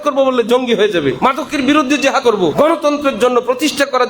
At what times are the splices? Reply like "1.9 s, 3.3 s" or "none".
1.2 s, 2.3 s